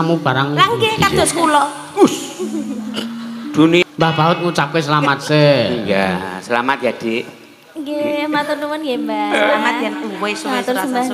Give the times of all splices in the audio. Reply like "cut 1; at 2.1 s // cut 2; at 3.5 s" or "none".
cut 1; at 3.8 s